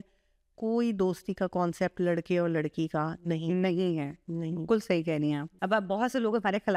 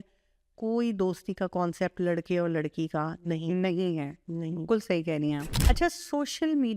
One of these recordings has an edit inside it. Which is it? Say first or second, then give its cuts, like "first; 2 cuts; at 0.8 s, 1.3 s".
second; 1 cut; at 5.6 s